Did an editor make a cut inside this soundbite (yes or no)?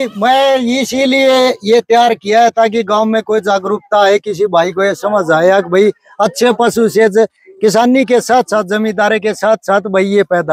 no